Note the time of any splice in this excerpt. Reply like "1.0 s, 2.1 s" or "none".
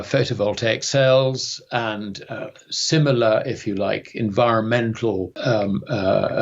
5.3 s